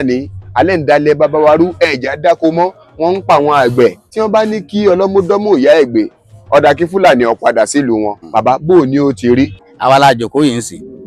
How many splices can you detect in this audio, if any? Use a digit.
3